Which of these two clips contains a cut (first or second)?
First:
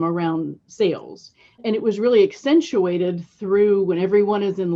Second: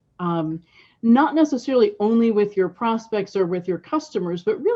first